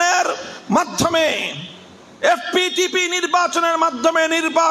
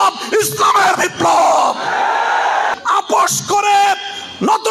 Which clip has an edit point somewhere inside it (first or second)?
second